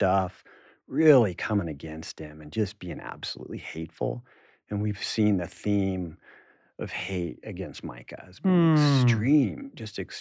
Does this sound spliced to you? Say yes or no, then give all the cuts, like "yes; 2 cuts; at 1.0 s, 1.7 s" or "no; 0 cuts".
no; 0 cuts